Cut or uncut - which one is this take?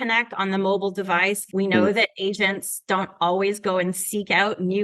cut